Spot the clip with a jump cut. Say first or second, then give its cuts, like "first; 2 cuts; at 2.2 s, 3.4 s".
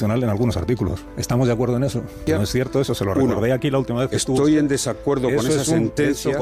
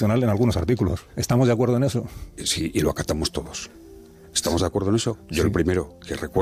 first; 1 cut; at 2.2 s